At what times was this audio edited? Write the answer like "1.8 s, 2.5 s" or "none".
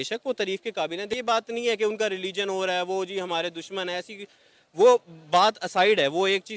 1.1 s

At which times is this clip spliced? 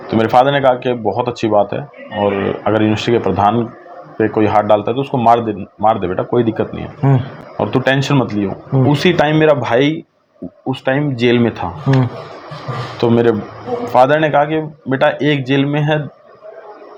none

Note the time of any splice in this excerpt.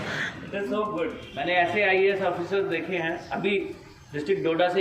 1.2 s

